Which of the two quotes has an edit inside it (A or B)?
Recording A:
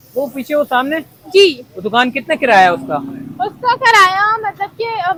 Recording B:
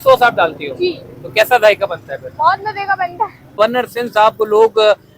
B